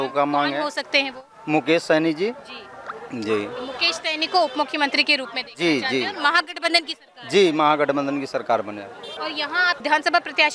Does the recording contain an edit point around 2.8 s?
no; 0 cuts

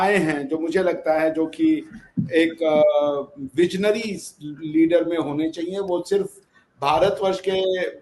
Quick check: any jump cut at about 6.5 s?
no; 0 cuts

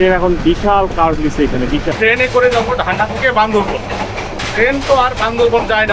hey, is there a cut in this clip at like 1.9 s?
yes; 1 cut; at 1.9 s

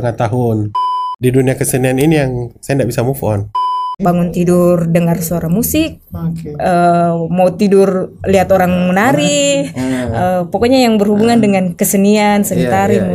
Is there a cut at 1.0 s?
yes; 2 cuts; at 1.0 s, 3.5 s

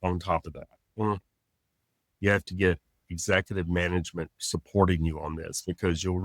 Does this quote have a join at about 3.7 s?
no; 1 cut; at 2.0 s

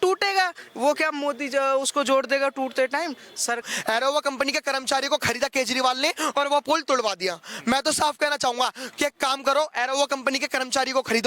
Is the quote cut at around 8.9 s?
yes; 2 cuts; at 3.6 s, 8.9 s

